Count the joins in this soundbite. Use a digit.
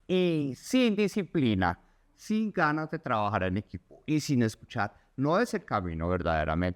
0